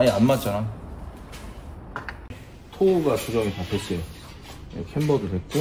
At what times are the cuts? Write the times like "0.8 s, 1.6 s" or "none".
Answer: none